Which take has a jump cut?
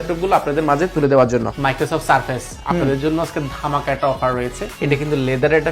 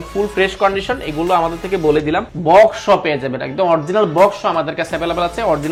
first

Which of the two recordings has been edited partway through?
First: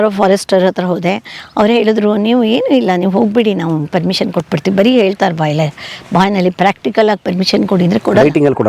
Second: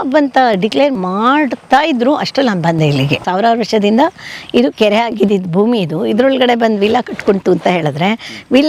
second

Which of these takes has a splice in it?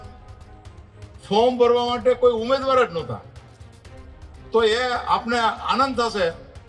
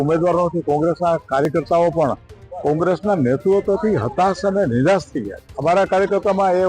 second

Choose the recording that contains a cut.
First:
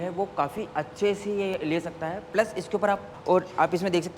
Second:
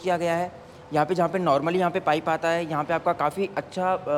first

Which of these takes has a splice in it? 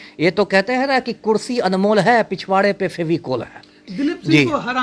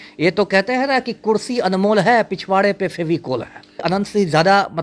second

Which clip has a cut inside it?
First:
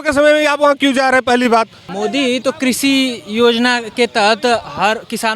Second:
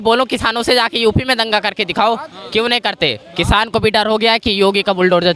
first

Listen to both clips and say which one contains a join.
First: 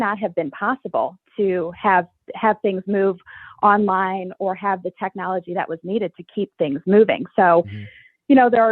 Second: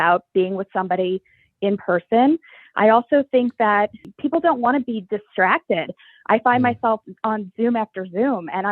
second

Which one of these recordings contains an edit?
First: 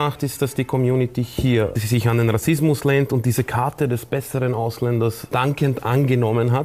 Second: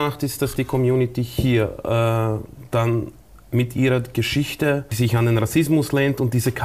first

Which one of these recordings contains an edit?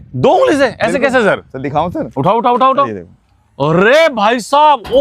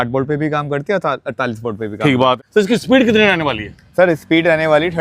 second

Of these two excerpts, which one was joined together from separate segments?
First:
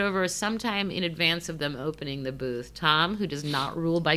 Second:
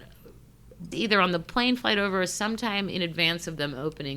second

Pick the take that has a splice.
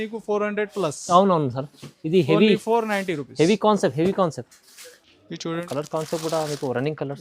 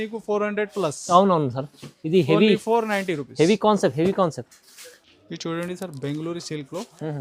first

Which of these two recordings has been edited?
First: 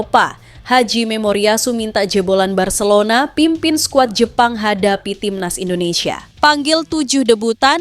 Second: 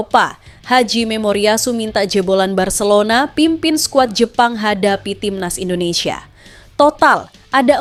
first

